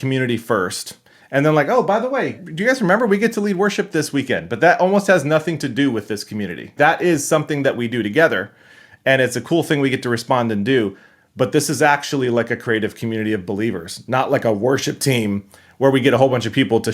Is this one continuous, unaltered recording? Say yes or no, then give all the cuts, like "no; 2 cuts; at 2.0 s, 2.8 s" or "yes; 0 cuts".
no; 2 cuts; at 2.4 s, 6.7 s